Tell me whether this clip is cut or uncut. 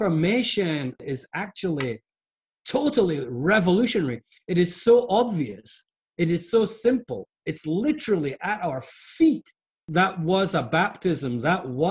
cut